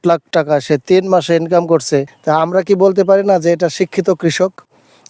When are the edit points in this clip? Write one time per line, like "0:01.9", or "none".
0:02.1